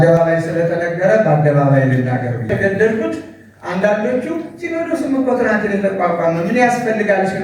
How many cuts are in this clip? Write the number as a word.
one